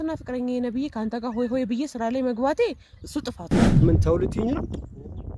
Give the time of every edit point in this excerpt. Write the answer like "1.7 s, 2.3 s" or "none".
3.6 s